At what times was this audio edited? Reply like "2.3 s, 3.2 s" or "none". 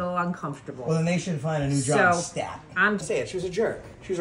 3.0 s

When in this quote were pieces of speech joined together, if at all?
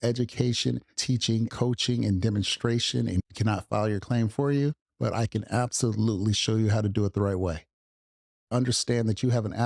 8.4 s

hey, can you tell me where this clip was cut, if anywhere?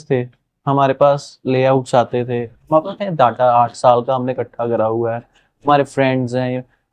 none

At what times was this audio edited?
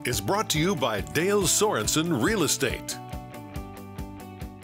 2.8 s

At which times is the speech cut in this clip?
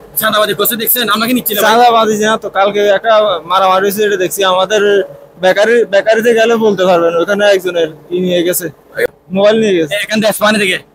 9.1 s

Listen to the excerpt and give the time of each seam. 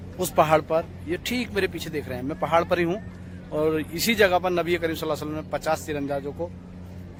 none

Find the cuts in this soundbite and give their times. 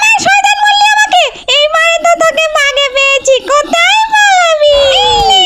none

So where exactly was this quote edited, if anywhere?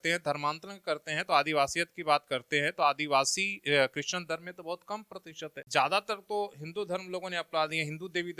5.6 s

